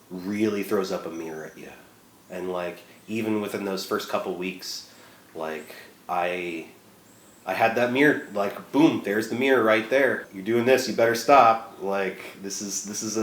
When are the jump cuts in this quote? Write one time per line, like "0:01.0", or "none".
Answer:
0:10.3